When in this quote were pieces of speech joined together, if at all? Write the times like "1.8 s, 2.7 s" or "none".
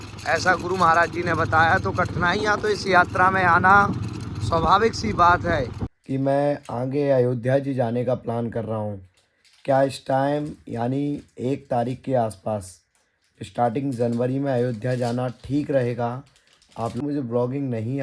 5.8 s, 17.0 s

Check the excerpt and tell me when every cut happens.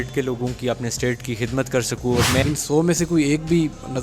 2.4 s

